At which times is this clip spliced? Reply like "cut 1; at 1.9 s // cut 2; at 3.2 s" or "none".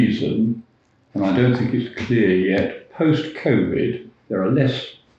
cut 1; at 4.1 s

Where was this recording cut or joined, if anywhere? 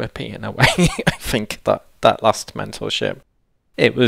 none

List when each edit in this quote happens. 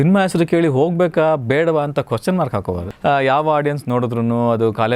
cut 1; at 2.7 s

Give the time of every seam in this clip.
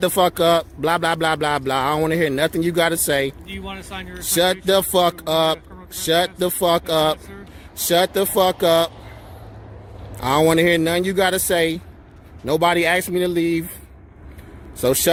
none

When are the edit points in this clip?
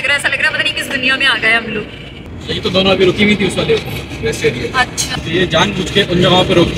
cut 1; at 2.2 s // cut 2; at 5.1 s

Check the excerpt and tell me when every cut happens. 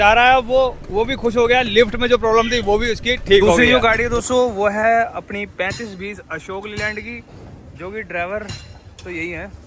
cut 1; at 3.6 s

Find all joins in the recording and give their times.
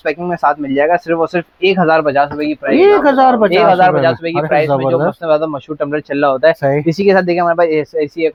none

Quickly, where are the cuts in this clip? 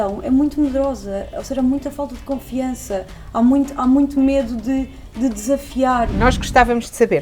cut 1; at 6.1 s

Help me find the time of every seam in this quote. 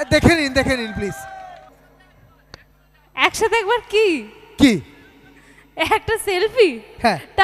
cut 1; at 1.7 s

